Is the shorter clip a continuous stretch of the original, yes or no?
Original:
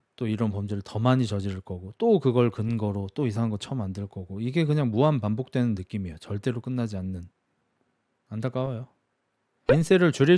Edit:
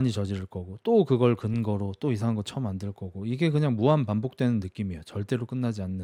yes